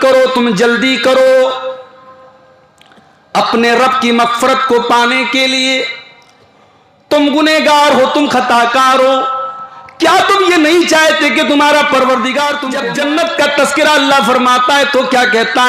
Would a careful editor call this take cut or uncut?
cut